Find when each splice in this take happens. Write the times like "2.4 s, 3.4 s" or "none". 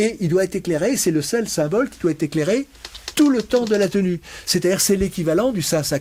none

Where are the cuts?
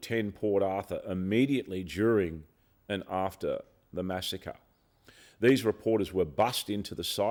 none

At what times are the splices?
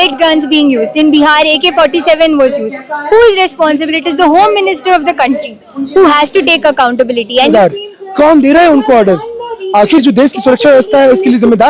7.5 s

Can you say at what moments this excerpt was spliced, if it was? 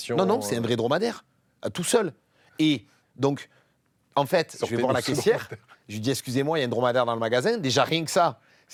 none

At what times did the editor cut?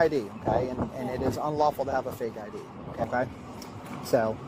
3.0 s

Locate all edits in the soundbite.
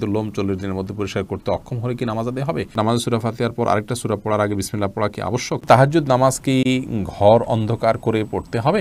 2.7 s, 5.6 s

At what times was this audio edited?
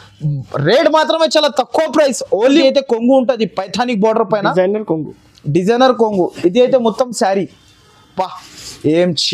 2.6 s

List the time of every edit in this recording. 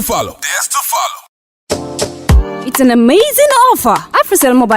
1.1 s

